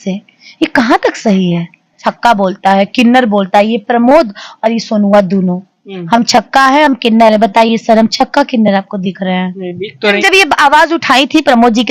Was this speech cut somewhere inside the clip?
yes; 2 cuts; at 2.1 s, 10.2 s

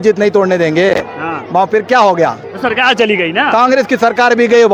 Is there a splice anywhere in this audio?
no; 0 cuts

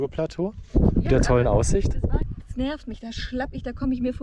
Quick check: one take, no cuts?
no; 1 cut; at 2.3 s

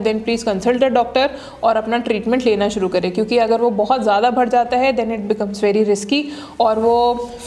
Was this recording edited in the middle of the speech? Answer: no; 0 cuts

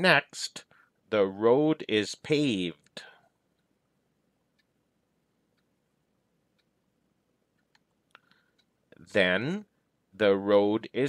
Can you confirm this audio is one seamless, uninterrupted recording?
yes; 0 cuts

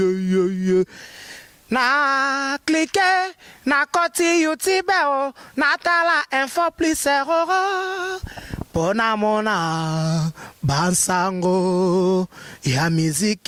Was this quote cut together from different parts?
no; 0 cuts

